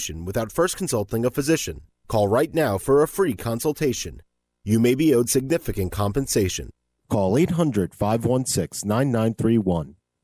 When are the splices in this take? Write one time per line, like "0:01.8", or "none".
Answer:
none